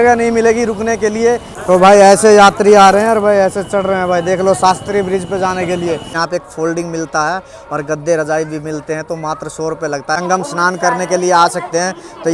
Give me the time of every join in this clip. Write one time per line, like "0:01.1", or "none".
0:01.5
0:06.2
0:10.2